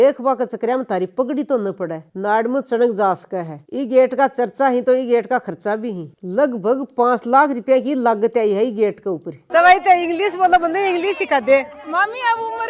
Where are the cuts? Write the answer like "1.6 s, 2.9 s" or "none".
3.6 s, 6.1 s, 9.3 s